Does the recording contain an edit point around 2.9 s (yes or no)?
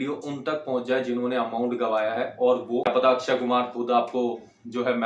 yes